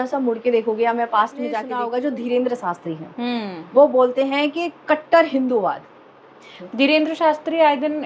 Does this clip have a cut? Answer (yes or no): yes